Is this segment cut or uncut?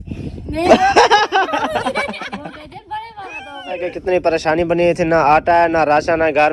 cut